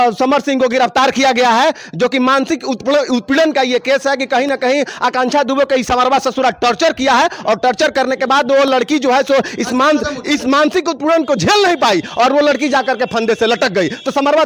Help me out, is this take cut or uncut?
uncut